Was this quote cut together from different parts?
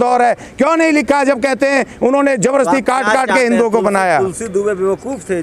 no; 0 cuts

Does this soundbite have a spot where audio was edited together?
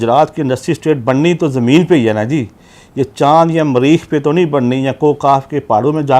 no; 0 cuts

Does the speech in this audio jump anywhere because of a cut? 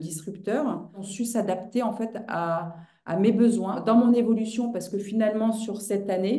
yes; 2 cuts; at 1.0 s, 3.8 s

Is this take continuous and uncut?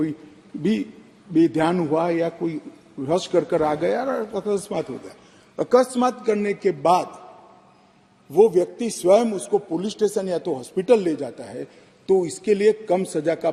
yes; 0 cuts

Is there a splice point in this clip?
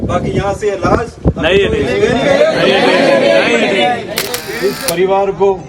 yes; 1 cut; at 4.5 s

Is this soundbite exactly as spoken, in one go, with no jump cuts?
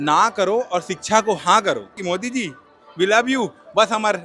no; 1 cut; at 2.0 s

